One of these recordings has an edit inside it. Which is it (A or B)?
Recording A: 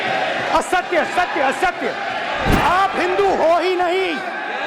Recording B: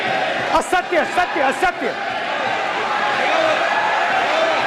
A